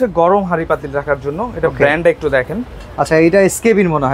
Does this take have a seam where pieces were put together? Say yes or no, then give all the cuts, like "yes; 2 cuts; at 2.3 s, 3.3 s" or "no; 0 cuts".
no; 0 cuts